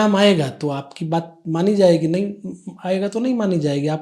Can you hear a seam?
no; 0 cuts

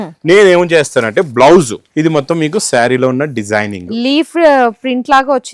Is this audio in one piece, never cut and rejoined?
no; 1 cut; at 1.8 s

